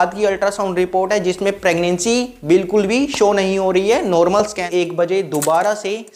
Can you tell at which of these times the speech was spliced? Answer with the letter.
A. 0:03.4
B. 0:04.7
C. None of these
B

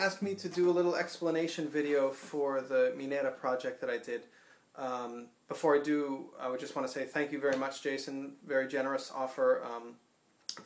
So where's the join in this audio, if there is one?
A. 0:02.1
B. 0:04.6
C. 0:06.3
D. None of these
D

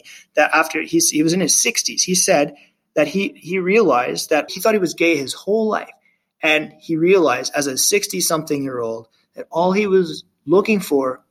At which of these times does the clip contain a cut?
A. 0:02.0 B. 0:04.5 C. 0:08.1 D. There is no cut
B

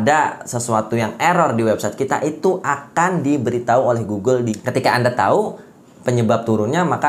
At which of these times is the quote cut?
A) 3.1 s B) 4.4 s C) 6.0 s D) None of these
B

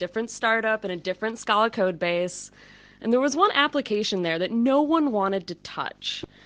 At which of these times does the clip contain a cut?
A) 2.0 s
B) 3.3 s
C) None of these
B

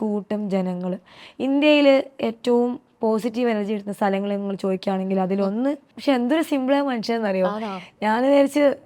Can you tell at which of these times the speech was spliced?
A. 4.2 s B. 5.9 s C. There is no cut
B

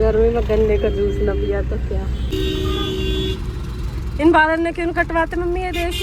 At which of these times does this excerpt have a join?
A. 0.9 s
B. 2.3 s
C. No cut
B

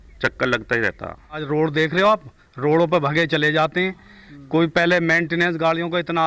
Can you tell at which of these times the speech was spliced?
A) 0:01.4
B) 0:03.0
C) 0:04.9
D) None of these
A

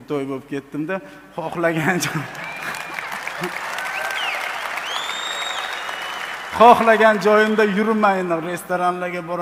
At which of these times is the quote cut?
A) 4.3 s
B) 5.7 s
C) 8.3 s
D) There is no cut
D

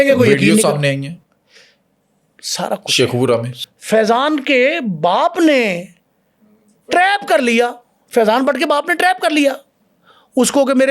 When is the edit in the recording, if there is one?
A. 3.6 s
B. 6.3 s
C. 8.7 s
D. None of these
A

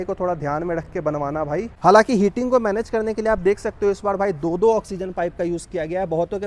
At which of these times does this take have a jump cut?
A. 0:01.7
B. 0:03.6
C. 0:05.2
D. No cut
A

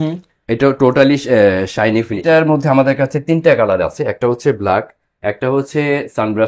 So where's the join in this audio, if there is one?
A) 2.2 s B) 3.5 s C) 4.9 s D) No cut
A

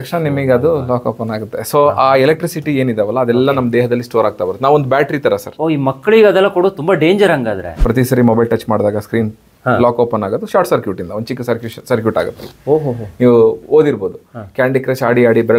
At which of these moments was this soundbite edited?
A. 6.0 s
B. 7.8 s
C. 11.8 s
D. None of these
B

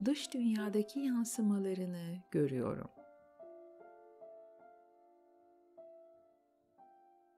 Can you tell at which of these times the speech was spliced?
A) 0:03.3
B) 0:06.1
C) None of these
A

